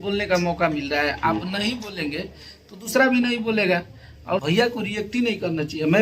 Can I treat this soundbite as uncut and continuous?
no; 1 cut; at 4.4 s

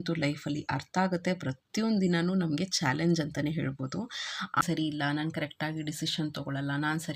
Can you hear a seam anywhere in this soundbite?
yes; 1 cut; at 4.6 s

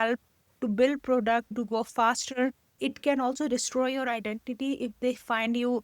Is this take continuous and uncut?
no; 2 cuts; at 1.5 s, 2.8 s

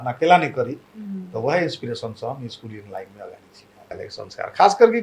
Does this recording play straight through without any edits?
no; 1 cut; at 3.9 s

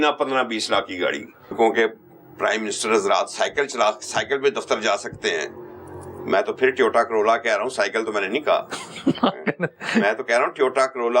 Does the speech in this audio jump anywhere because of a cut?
yes; 1 cut; at 1.5 s

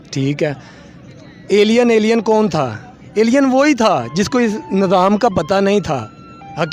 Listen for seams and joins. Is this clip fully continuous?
yes; 0 cuts

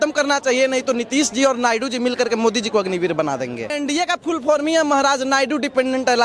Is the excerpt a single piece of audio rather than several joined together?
no; 1 cut; at 3.8 s

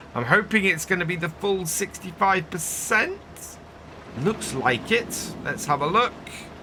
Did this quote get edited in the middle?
no; 0 cuts

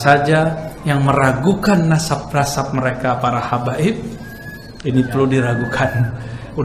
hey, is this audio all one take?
yes; 0 cuts

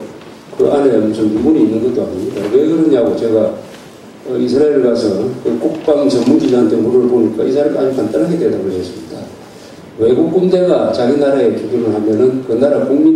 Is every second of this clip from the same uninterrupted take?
no; 1 cut; at 9.1 s

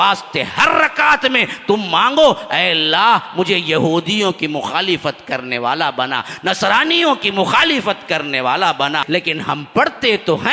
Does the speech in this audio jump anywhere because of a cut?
yes; 1 cut; at 9.0 s

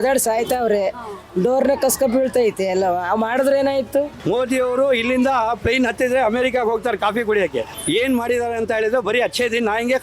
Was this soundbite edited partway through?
yes; 2 cuts; at 4.1 s, 7.7 s

